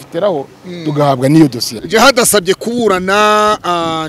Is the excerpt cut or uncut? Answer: cut